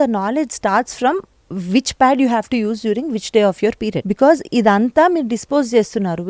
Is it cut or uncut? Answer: cut